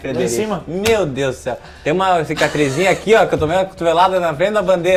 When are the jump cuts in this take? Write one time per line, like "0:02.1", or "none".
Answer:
none

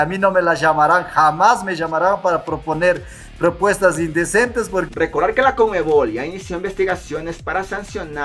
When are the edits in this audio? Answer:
0:04.9

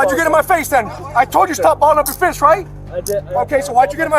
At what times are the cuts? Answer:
0:01.0

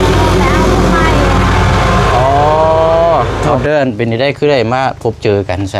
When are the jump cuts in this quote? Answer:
0:03.4

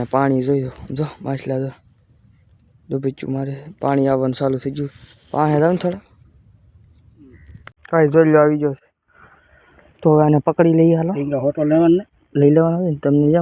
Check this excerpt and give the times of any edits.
0:07.8

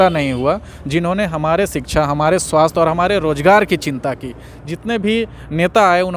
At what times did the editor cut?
none

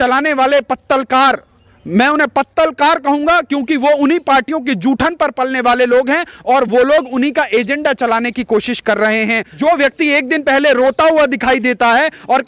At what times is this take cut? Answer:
0:09.5

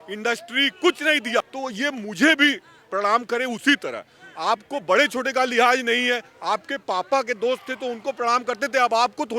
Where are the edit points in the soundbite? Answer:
0:01.4

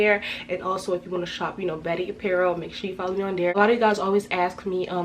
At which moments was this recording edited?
0:03.6

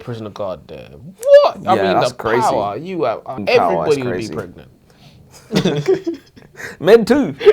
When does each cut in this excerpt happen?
0:03.4

